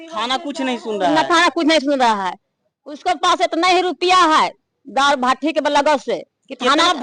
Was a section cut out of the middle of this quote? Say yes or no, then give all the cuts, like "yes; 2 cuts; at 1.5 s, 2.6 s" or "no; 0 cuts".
no; 0 cuts